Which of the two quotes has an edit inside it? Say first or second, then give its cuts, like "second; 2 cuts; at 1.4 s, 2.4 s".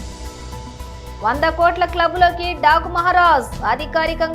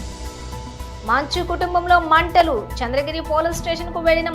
second; 1 cut; at 1.0 s